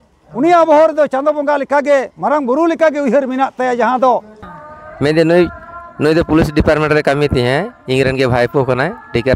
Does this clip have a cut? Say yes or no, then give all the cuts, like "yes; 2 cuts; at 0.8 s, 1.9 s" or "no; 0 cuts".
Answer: yes; 1 cut; at 4.5 s